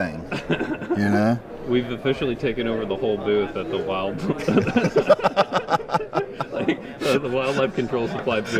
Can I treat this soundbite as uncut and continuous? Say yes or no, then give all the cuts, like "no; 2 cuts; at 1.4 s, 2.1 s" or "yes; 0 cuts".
yes; 0 cuts